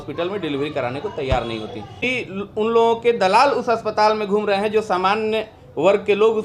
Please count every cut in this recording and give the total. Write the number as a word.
one